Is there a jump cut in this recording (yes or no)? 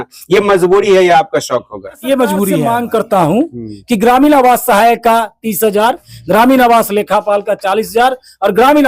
yes